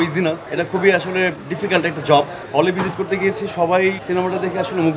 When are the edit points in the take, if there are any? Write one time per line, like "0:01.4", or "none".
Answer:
0:02.3
0:04.0

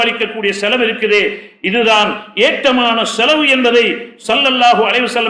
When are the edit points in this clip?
none

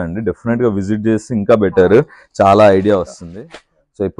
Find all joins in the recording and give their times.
0:03.2

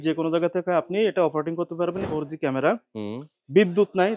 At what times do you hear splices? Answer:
0:02.0

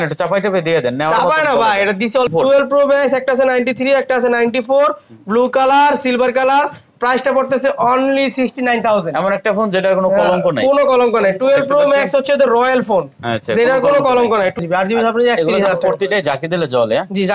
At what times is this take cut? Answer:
0:02.3
0:14.6

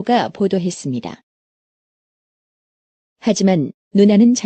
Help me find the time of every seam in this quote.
0:03.5

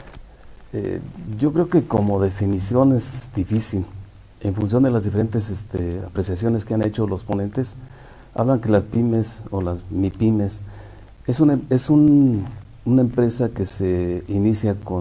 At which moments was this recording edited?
0:04.9

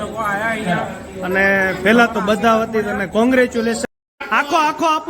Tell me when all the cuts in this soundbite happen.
0:04.1

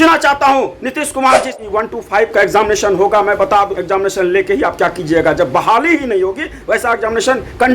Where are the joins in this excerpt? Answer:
0:01.5

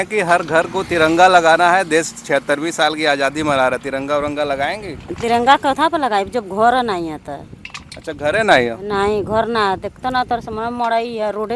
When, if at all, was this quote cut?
none

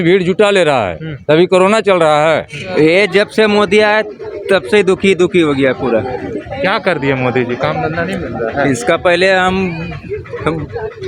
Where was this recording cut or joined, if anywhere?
0:02.6

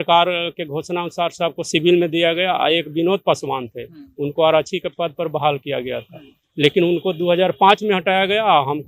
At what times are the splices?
none

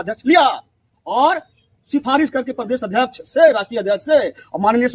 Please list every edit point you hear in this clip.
none

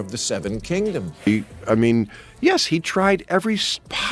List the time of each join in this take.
0:01.1

